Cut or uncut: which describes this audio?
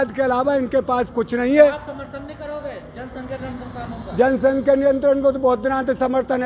uncut